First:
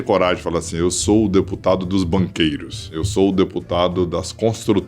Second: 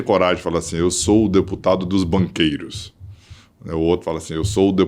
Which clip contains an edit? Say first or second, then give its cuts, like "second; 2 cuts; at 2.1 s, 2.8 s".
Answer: first; 1 cut; at 2.9 s